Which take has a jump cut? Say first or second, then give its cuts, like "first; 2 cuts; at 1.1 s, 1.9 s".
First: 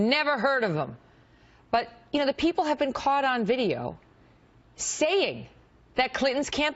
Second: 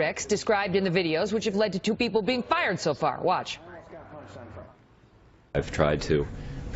second; 1 cut; at 2.0 s